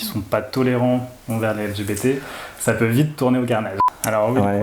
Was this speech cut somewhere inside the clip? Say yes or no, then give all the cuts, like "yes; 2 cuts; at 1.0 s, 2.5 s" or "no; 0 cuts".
yes; 1 cut; at 3.7 s